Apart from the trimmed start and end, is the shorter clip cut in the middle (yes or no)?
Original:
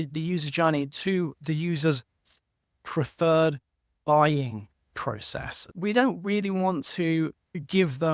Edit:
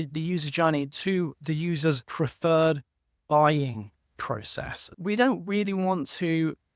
yes